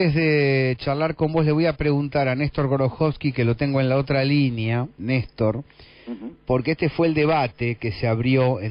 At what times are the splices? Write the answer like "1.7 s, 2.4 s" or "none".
6.7 s